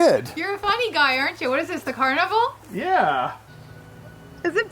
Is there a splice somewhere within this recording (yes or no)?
yes